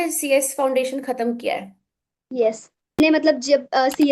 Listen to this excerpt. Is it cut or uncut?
cut